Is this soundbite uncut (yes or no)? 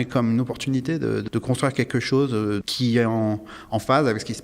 no